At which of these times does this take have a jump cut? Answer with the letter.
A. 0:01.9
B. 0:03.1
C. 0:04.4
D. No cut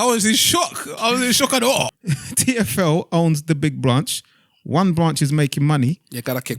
A